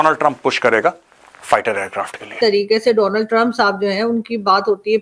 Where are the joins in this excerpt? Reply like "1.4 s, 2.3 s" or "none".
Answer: 2.3 s